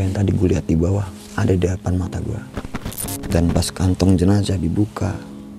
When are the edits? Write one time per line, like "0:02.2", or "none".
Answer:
0:02.9